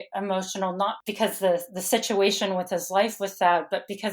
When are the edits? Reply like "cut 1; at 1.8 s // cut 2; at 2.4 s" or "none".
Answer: cut 1; at 1.0 s